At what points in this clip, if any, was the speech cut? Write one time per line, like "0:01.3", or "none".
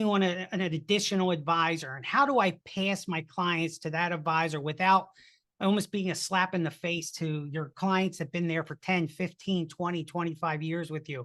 none